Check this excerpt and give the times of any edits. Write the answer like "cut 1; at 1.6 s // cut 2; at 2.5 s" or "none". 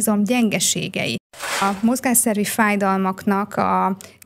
cut 1; at 1.5 s